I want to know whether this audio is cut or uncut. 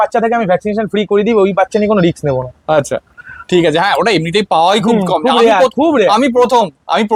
uncut